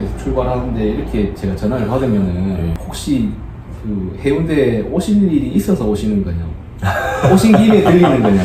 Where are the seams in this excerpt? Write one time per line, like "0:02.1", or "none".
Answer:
0:02.8